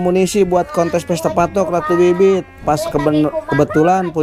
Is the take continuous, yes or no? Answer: yes